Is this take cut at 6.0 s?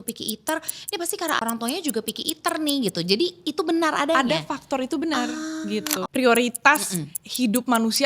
yes; 2 cuts; at 1.4 s, 6.0 s

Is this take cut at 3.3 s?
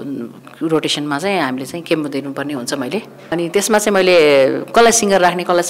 yes; 1 cut; at 3.3 s

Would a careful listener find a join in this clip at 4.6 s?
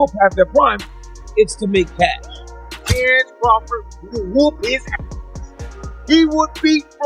no; 1 cut; at 2.8 s

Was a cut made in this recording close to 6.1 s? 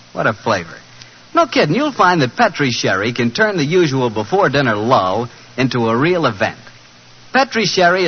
yes; 1 cut; at 6.1 s

